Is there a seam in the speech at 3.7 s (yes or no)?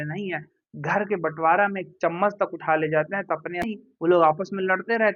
yes